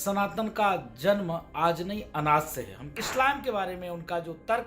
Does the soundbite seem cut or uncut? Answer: cut